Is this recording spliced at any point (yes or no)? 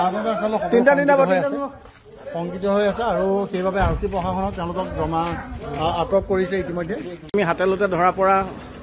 no